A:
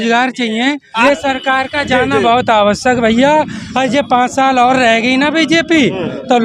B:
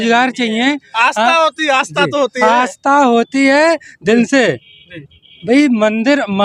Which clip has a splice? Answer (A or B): A